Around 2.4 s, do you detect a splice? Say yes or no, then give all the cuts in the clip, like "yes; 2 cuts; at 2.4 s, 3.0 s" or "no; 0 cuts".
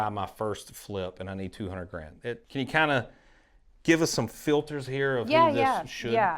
yes; 1 cut; at 2.4 s